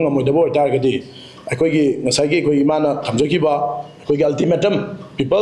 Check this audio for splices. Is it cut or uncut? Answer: uncut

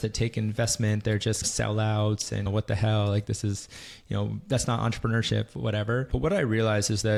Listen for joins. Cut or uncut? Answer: uncut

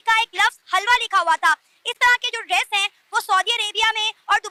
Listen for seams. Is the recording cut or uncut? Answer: uncut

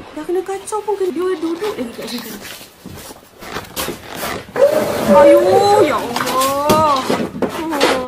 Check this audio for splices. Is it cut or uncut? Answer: cut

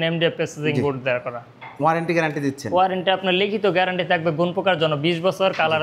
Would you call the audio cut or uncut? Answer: uncut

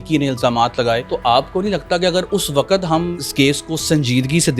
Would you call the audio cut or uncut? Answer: cut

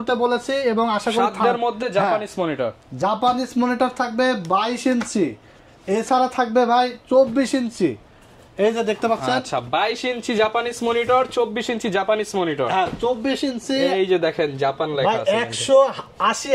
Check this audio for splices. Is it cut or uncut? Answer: uncut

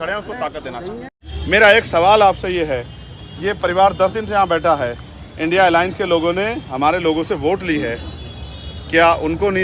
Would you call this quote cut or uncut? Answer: cut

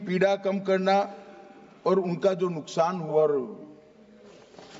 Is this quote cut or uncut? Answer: uncut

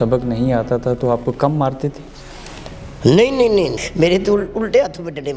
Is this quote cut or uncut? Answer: cut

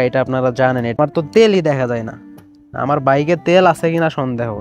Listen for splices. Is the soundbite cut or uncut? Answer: cut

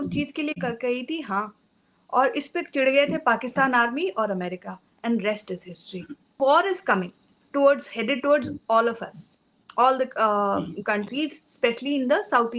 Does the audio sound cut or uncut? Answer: cut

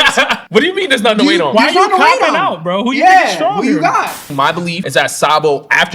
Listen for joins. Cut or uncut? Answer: cut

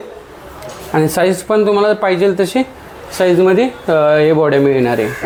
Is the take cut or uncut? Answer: uncut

